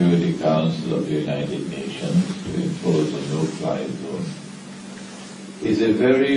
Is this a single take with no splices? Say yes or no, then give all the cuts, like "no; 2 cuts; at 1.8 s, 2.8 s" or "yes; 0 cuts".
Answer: no; 1 cut; at 2.4 s